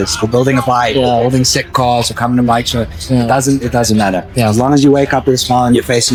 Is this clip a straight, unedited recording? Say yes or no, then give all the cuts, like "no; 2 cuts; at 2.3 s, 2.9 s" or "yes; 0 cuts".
yes; 0 cuts